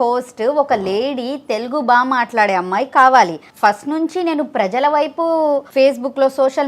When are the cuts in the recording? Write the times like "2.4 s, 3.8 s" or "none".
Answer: 3.4 s, 5.7 s

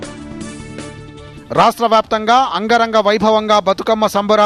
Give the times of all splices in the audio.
1.3 s

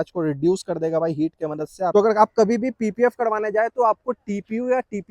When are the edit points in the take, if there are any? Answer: 1.9 s

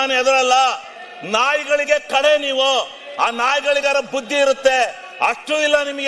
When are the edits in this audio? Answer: none

